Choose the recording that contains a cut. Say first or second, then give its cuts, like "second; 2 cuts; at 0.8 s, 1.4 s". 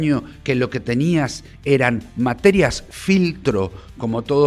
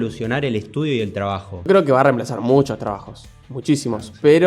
second; 1 cut; at 1.7 s